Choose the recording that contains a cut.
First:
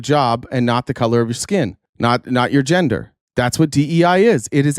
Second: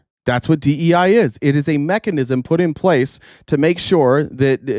first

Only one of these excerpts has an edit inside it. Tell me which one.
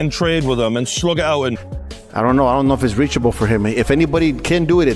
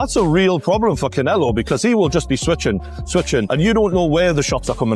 first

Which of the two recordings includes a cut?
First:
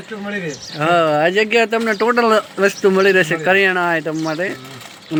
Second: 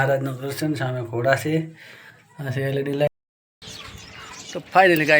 second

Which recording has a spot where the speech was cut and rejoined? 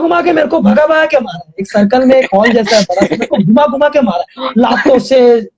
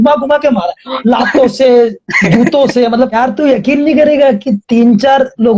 second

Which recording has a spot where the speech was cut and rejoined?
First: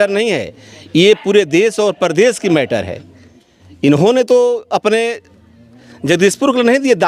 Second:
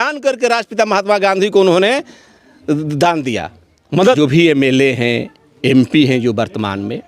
second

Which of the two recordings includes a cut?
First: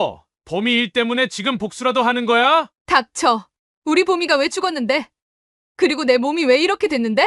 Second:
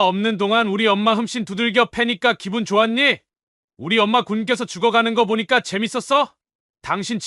first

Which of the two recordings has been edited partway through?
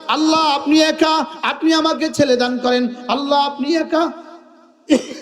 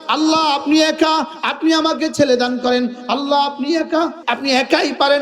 second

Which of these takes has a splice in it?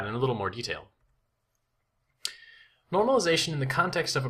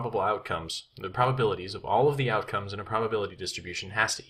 first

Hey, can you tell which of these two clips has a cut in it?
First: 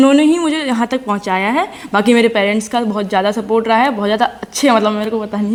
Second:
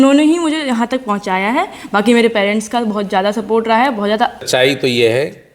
second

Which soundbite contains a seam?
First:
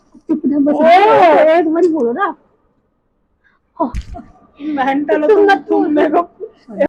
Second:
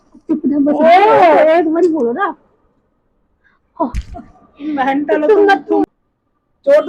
second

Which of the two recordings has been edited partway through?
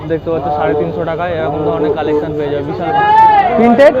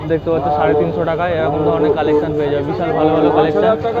first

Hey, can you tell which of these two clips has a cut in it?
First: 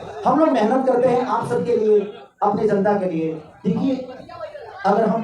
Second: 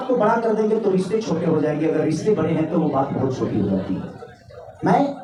first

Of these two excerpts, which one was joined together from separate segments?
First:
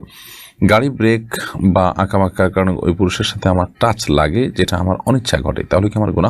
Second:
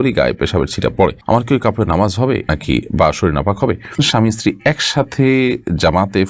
second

